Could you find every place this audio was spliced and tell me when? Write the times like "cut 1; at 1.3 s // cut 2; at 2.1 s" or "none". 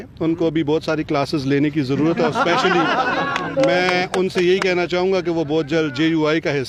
none